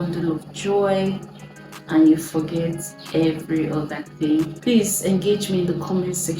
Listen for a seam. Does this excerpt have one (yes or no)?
yes